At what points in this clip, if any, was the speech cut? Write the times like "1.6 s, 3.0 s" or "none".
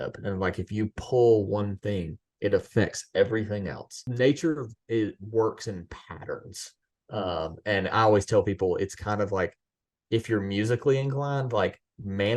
4.0 s